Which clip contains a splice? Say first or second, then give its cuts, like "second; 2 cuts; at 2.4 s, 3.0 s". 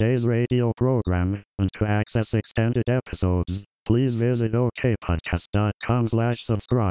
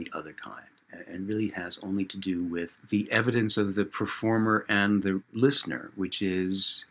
second; 2 cuts; at 2.8 s, 5.3 s